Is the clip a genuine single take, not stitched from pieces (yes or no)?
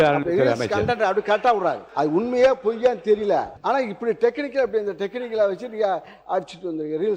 no